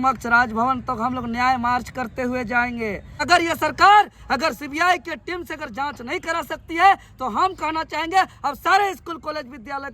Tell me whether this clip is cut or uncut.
cut